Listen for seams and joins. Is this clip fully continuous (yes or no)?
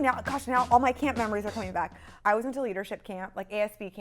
no